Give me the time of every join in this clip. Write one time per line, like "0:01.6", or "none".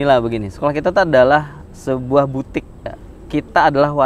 0:03.0